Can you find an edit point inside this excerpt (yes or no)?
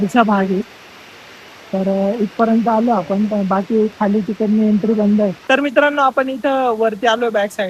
no